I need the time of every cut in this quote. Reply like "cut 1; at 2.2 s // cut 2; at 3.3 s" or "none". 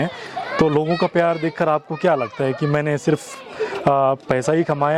none